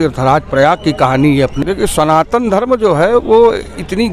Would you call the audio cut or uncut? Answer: cut